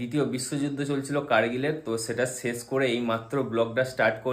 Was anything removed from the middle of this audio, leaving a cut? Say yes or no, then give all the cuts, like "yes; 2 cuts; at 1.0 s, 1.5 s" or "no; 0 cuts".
no; 0 cuts